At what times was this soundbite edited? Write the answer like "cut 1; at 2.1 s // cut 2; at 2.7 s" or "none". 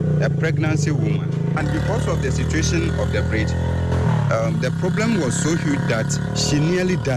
cut 1; at 1.6 s // cut 2; at 6.3 s